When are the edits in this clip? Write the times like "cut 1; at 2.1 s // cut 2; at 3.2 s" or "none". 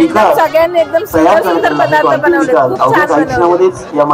none

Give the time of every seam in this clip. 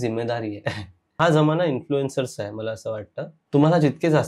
cut 1; at 1.0 s // cut 2; at 3.4 s

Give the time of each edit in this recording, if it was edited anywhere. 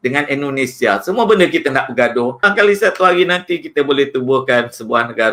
cut 1; at 2.5 s

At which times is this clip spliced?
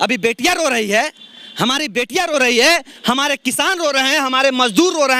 none

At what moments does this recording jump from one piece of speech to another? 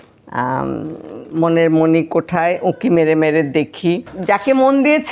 cut 1; at 4.1 s

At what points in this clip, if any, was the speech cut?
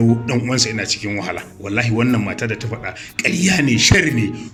none

